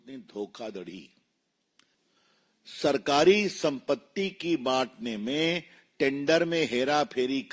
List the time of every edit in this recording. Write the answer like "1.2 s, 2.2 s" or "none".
2.0 s

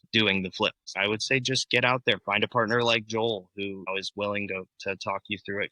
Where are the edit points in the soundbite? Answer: 0.9 s, 3.8 s

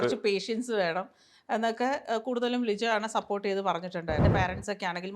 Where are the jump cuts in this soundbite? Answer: 4.2 s

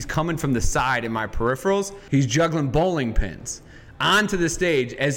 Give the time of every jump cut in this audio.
2.0 s

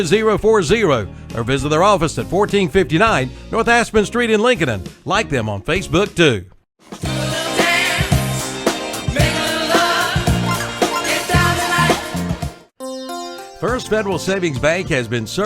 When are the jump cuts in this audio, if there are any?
8.6 s

